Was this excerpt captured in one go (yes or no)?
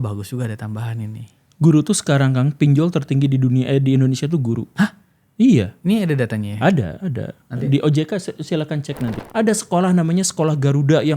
no